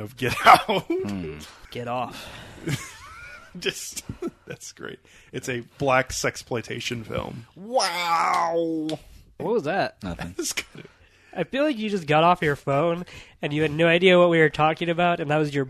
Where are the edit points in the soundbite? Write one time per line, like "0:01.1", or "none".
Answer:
0:01.5
0:09.2